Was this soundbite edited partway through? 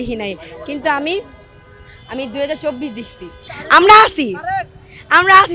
no; 0 cuts

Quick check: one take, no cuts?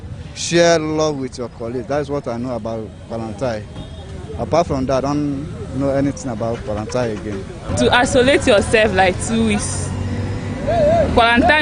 no; 1 cut; at 7.5 s

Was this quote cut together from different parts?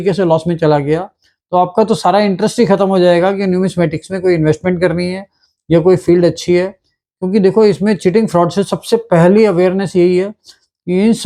no; 0 cuts

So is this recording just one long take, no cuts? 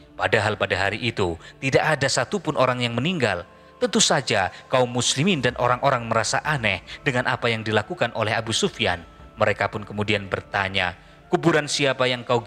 yes; 0 cuts

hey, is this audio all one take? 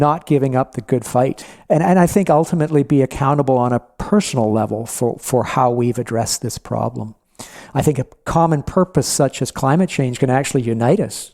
no; 1 cut; at 1.5 s

